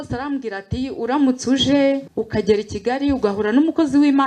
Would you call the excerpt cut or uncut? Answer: cut